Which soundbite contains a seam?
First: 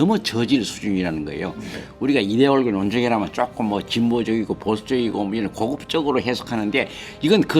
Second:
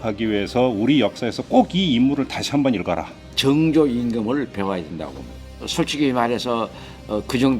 second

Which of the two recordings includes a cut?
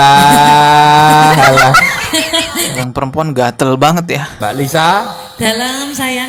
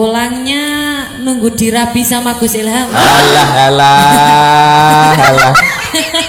first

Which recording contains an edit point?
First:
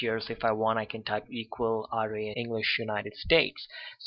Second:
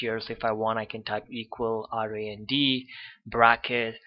second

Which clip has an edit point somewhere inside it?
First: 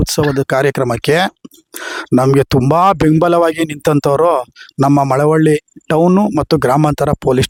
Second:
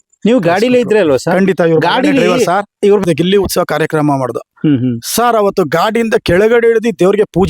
second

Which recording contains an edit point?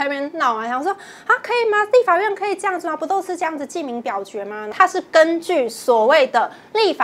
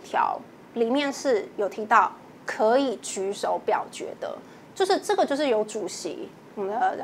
first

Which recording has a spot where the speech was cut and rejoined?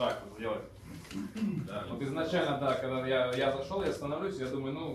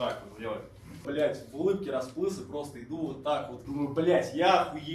second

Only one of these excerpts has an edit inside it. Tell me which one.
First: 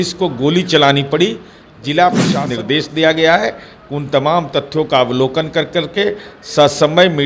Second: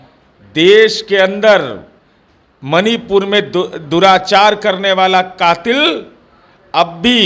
first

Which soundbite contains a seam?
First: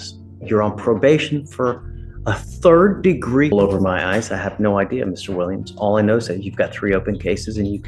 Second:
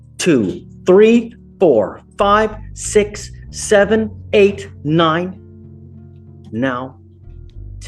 first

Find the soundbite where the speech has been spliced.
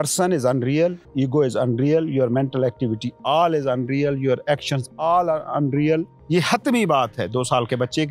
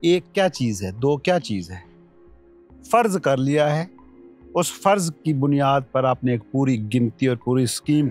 first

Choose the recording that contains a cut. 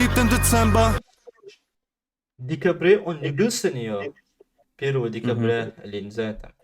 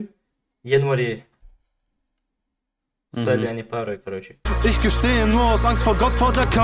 first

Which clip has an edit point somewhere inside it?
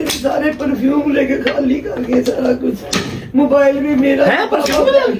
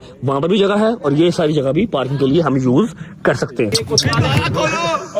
second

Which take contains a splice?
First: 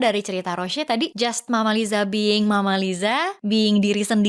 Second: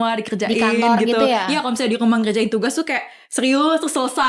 first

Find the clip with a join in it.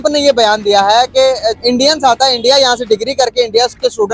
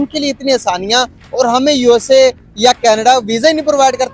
first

